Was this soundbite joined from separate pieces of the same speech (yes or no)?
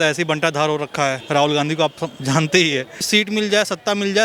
yes